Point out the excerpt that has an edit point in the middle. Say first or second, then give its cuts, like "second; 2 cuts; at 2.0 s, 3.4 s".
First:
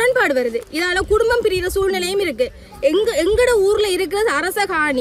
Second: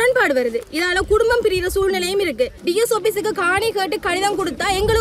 second; 1 cut; at 2.6 s